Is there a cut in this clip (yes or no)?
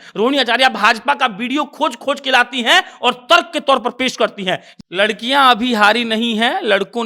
yes